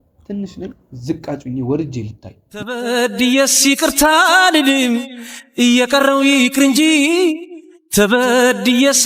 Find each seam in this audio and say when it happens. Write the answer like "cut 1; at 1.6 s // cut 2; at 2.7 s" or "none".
none